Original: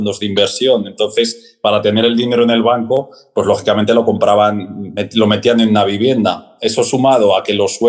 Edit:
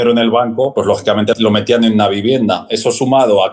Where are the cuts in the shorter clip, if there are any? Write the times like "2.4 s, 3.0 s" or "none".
0.9 s, 2.7 s